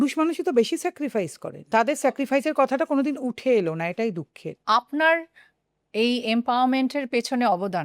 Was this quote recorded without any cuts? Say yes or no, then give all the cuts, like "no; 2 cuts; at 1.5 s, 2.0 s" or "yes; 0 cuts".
no; 2 cuts; at 1.7 s, 4.5 s